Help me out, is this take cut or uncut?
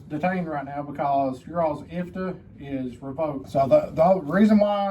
cut